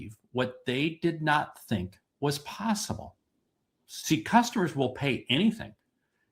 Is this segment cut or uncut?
cut